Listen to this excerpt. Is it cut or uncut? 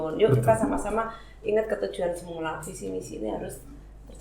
uncut